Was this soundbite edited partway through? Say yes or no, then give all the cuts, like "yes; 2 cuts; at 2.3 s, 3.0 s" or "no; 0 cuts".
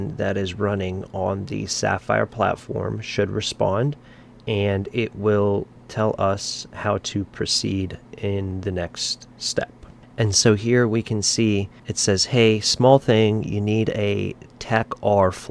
no; 0 cuts